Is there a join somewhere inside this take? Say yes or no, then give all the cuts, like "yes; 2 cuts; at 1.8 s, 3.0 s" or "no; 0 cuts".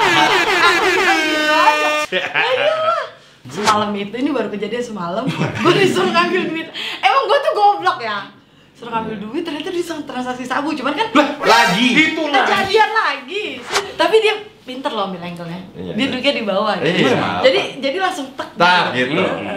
yes; 2 cuts; at 3.3 s, 13.6 s